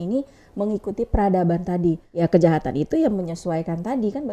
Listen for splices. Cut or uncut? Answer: cut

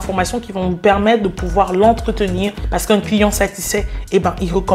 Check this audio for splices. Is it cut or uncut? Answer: cut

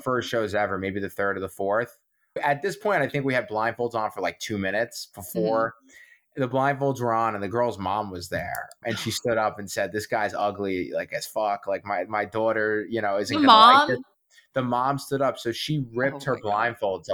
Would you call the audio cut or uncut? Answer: uncut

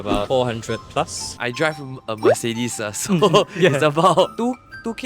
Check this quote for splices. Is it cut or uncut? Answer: uncut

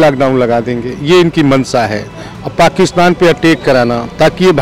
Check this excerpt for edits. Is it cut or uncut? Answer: uncut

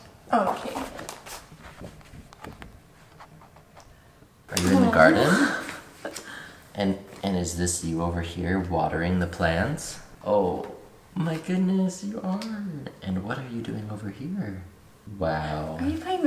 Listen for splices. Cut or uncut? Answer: uncut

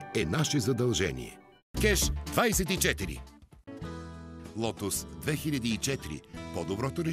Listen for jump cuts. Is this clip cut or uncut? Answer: uncut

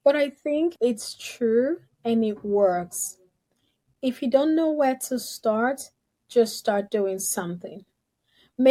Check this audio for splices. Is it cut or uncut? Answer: uncut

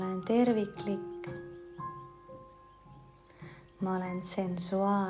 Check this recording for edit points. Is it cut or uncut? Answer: cut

